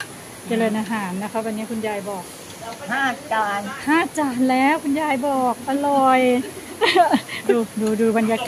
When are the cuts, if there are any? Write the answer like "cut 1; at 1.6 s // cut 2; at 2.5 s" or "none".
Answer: cut 1; at 7.5 s